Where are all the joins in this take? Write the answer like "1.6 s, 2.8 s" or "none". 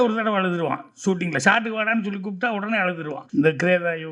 3.2 s